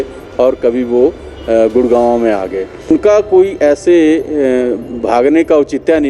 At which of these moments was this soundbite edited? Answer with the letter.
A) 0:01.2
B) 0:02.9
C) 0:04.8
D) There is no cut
B